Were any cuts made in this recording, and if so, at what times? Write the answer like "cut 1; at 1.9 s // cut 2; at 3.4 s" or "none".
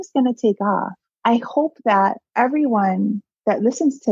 cut 1; at 1.1 s // cut 2; at 2.2 s